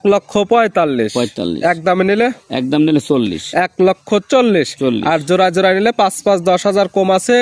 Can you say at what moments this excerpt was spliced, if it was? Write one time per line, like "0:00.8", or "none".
none